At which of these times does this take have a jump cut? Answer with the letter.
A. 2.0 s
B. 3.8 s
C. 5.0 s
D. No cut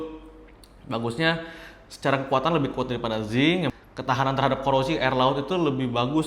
B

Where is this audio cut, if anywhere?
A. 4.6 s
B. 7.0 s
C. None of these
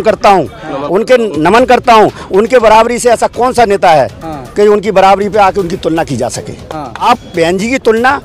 B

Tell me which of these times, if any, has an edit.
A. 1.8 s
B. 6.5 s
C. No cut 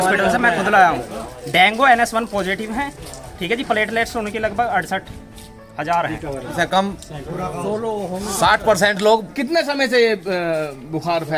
B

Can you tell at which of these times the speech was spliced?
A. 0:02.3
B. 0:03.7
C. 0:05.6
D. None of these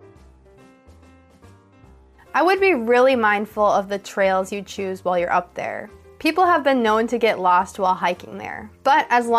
A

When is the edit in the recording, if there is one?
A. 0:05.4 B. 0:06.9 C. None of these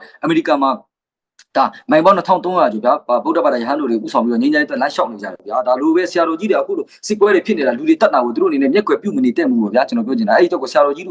A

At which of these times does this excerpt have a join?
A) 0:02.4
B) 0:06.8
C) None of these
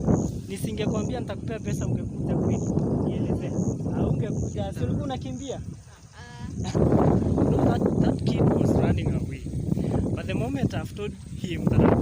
B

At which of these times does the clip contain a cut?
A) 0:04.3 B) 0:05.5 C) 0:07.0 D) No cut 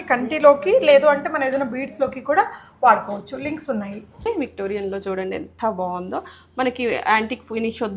A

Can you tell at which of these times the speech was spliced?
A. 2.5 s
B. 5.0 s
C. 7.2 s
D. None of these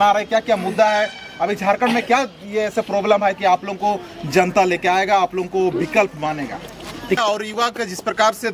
C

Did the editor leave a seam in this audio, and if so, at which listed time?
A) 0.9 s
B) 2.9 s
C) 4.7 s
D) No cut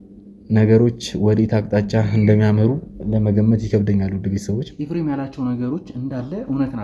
C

